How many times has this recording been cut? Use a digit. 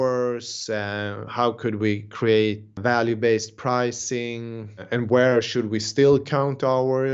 2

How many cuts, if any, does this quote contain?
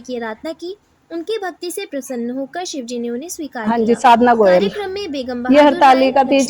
1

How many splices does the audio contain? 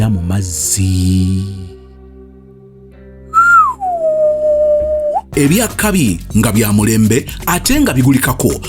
1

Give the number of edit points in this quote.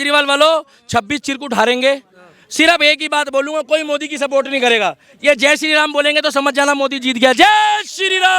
0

